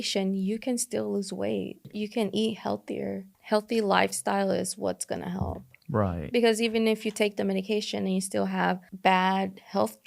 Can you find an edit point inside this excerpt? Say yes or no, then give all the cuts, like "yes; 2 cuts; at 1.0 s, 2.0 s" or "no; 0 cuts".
yes; 3 cuts; at 1.9 s, 3.3 s, 8.9 s